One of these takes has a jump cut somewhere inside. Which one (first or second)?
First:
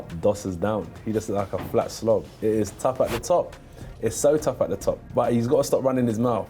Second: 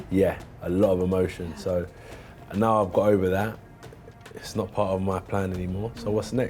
first